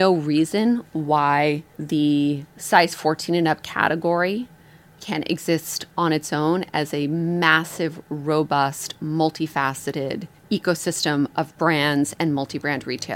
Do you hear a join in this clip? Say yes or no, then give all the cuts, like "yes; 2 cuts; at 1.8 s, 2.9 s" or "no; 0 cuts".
yes; 4 cuts; at 1.7 s, 2.5 s, 5.0 s, 10.3 s